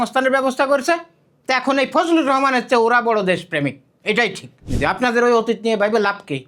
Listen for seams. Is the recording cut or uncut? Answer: cut